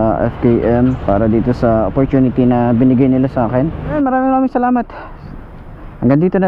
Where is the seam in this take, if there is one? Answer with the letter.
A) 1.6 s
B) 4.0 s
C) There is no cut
B